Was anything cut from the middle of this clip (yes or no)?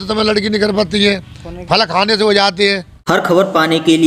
yes